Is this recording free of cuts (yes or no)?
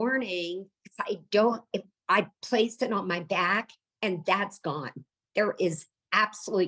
yes